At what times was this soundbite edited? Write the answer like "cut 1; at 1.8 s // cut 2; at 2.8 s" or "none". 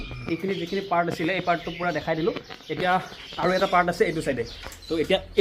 none